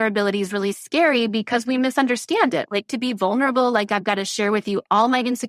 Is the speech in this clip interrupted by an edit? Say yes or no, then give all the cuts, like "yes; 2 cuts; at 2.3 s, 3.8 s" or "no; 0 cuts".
yes; 1 cut; at 2.7 s